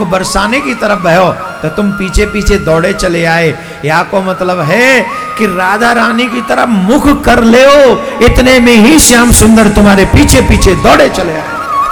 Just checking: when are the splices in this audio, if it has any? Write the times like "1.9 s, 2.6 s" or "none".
none

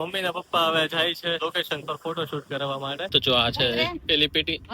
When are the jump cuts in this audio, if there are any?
1.4 s, 3.1 s

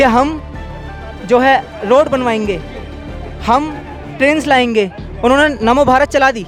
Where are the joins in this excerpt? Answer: none

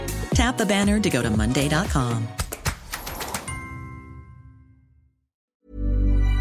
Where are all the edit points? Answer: 5.4 s

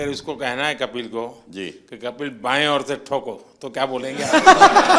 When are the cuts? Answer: none

